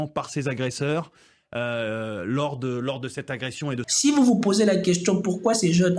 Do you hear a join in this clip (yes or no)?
yes